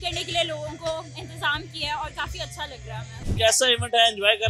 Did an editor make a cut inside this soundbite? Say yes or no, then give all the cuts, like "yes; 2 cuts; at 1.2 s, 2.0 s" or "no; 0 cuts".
yes; 1 cut; at 3.2 s